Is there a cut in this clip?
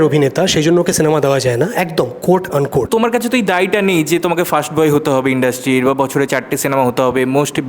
yes; 1 cut; at 2.9 s

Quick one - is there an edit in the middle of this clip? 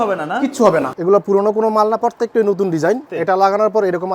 yes; 2 cuts; at 0.9 s, 3.1 s

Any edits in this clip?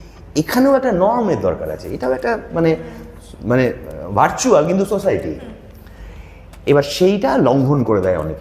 no; 0 cuts

